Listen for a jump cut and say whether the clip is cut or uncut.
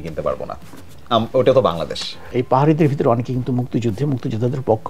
cut